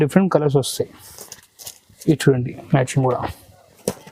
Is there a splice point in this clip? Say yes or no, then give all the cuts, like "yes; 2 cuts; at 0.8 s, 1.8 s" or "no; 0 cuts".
no; 0 cuts